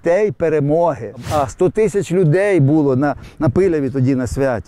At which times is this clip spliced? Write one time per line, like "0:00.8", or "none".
0:01.3